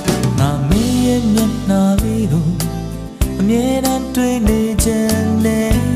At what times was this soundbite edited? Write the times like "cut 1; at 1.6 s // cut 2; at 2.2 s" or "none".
none